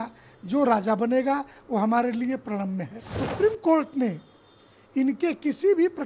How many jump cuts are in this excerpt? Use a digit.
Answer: 1